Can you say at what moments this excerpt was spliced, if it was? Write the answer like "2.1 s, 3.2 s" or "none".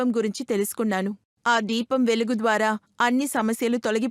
none